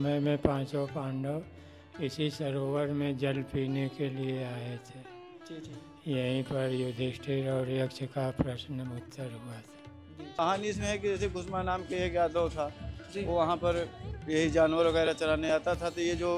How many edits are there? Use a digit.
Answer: 1